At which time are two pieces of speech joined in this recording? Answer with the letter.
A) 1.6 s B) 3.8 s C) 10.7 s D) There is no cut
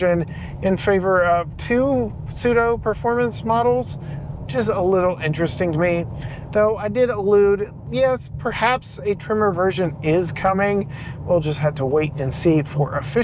D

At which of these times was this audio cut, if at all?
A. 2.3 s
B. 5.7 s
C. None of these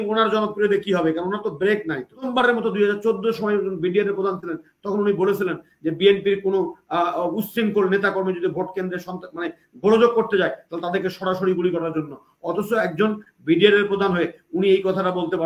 A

